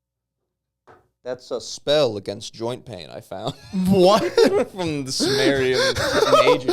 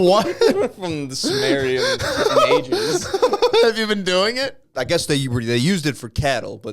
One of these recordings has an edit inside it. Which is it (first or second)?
second